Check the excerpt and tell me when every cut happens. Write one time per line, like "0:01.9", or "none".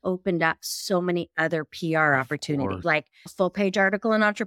0:03.2